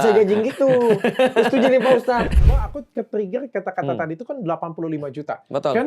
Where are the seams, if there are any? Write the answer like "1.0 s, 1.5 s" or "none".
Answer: 2.3 s